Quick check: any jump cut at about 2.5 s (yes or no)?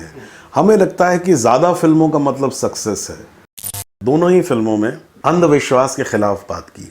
no